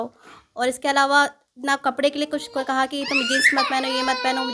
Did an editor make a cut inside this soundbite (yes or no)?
no